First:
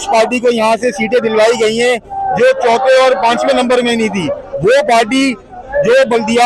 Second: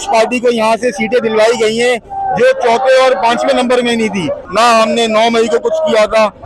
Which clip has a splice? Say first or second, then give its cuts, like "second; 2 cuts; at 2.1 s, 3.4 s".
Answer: second; 1 cut; at 4.4 s